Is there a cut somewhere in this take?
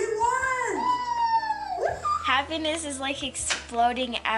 yes; 1 cut; at 2.1 s

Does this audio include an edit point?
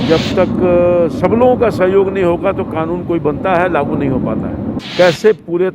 yes; 1 cut; at 4.8 s

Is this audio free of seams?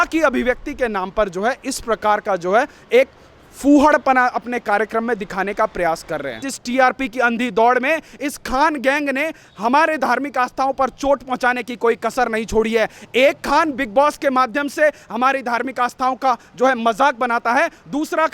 no; 1 cut; at 6.5 s

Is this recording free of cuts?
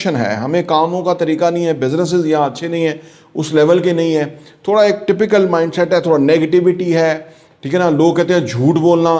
yes; 0 cuts

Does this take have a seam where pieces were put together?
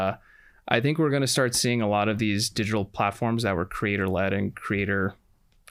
no; 0 cuts

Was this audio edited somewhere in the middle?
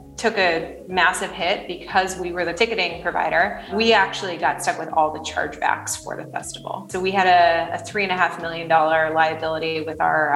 yes; 3 cuts; at 2.5 s, 3.7 s, 6.8 s

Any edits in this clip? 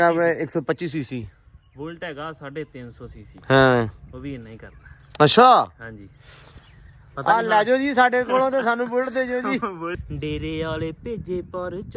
yes; 1 cut; at 10.0 s

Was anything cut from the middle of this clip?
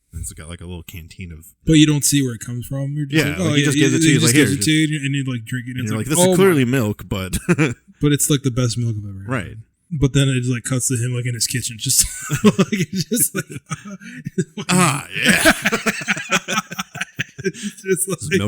yes; 1 cut; at 1.6 s

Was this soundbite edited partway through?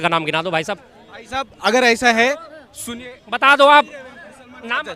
no; 0 cuts

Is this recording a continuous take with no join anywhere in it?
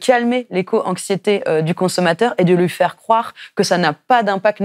yes; 0 cuts

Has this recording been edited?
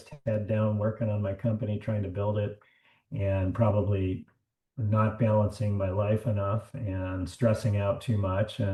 no; 0 cuts

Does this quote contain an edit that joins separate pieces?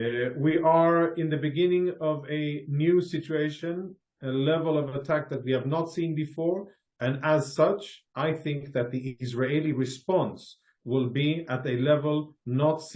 no; 0 cuts

